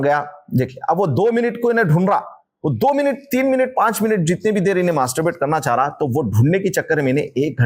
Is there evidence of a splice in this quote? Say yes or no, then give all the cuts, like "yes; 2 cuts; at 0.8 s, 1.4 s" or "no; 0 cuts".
no; 0 cuts